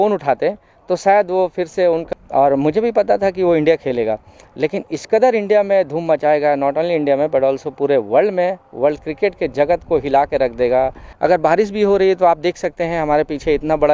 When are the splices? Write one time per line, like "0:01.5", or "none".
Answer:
0:02.0
0:11.0